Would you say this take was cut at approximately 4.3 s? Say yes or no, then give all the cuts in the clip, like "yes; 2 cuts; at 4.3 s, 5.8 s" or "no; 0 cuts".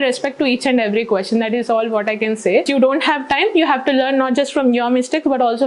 no; 1 cut; at 2.7 s